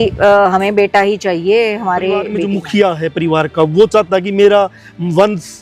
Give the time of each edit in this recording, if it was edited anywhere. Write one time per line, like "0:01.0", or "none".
0:02.4